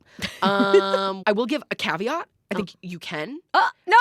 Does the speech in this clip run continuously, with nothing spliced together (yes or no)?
no